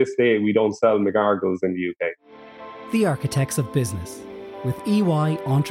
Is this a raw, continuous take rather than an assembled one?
no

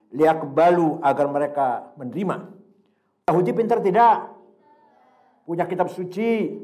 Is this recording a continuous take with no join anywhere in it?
no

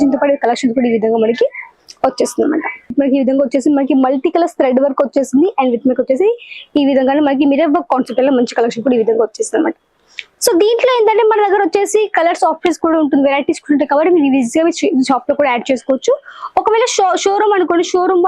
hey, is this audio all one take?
no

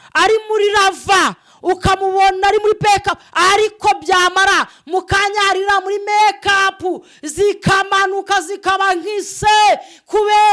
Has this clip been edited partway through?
no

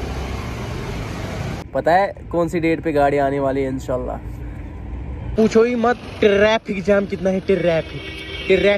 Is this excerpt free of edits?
no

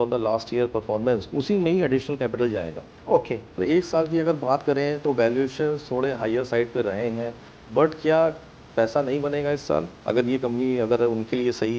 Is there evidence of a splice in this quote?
yes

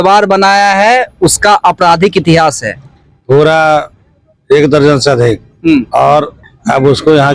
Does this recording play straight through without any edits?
yes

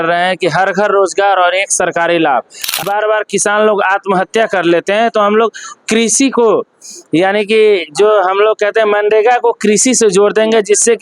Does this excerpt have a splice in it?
yes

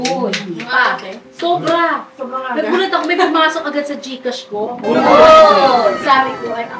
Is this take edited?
no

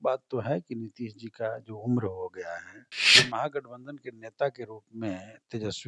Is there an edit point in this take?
yes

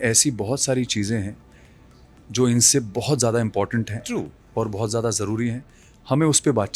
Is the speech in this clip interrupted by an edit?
no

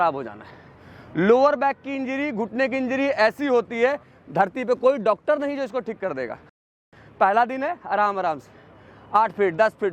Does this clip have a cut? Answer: yes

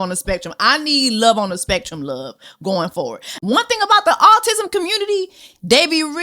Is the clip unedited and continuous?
no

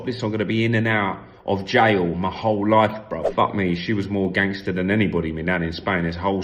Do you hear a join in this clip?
yes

